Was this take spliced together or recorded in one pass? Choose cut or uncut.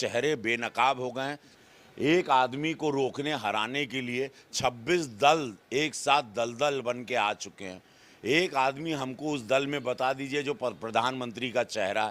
cut